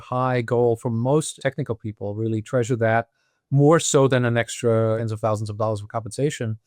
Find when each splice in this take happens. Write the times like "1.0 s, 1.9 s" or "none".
1.3 s, 5.0 s